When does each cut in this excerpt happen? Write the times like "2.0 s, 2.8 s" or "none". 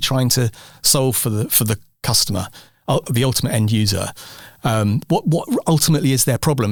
none